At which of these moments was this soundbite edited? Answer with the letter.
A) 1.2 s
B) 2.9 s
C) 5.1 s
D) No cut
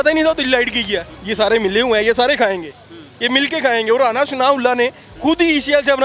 A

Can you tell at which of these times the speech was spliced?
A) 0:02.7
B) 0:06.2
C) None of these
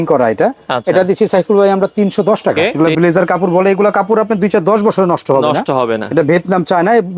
A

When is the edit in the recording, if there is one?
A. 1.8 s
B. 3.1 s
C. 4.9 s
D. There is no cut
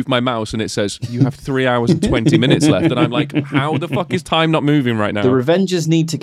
C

